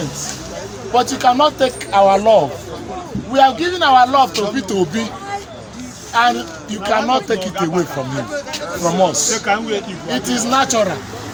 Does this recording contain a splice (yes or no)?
no